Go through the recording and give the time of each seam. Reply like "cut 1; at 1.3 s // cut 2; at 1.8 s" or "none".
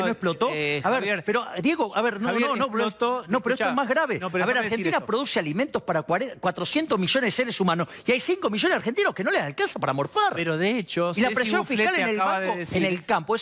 none